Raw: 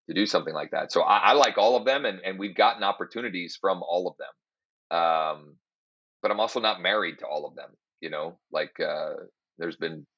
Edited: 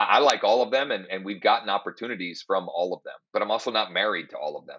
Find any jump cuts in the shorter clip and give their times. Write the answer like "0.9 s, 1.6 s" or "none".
3.1 s